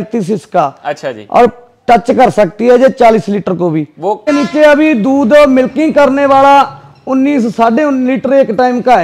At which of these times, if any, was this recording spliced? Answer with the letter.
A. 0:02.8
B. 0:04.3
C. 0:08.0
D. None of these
B